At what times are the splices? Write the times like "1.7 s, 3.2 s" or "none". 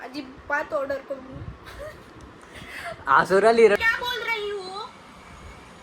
3.8 s

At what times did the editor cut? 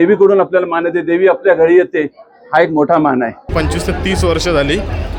3.5 s

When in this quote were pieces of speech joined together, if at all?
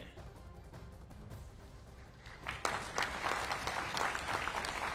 none

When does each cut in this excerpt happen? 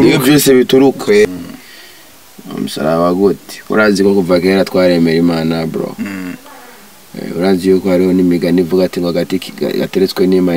1.2 s

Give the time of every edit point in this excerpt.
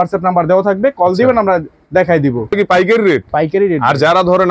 2.6 s

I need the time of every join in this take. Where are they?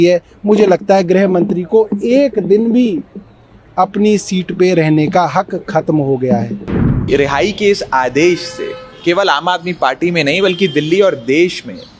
7.1 s

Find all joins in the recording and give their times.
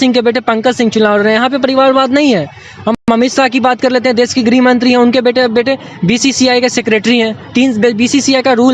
none

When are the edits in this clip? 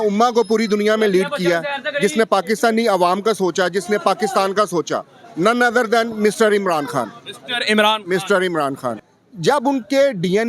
9.1 s

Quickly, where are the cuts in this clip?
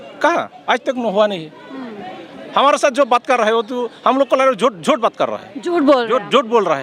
none

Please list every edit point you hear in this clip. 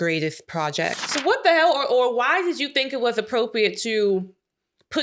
1.1 s

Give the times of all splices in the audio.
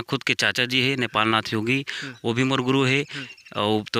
none

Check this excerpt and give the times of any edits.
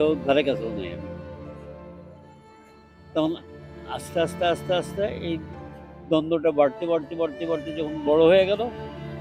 none

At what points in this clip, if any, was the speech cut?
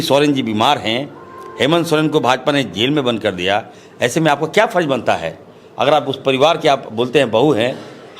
none

